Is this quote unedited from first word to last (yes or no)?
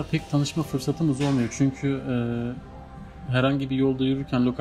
yes